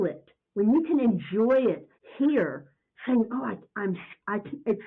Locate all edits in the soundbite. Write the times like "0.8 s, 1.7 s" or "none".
none